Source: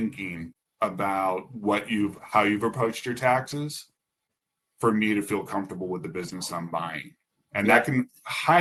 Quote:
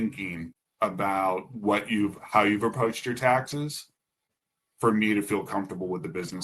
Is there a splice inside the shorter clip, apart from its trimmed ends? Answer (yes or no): no